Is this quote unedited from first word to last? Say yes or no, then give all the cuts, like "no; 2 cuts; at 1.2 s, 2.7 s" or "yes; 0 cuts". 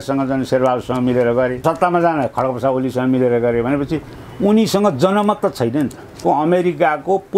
no; 2 cuts; at 1.6 s, 6.2 s